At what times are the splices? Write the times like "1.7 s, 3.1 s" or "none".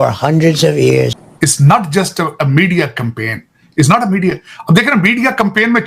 1.2 s